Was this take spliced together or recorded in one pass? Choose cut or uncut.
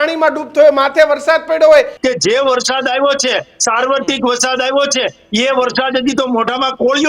cut